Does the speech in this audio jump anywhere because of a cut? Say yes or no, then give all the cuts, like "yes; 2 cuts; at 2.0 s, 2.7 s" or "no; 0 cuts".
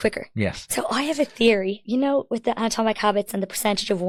no; 0 cuts